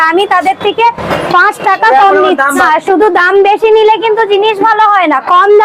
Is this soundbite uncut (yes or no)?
no